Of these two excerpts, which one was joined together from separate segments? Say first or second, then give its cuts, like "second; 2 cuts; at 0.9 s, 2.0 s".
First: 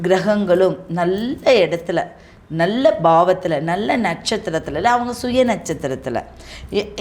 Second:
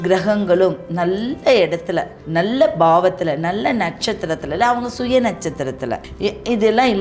second; 2 cuts; at 2.2 s, 6.1 s